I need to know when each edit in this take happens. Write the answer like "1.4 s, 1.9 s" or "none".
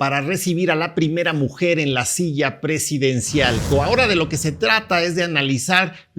3.6 s